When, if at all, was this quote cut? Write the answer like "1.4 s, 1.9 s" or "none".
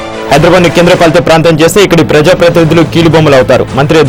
none